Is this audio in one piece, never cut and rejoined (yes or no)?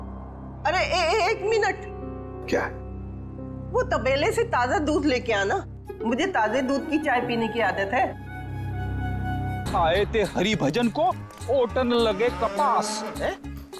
no